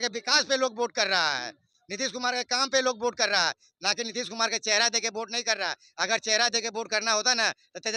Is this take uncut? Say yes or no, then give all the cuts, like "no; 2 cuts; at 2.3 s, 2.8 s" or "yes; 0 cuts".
yes; 0 cuts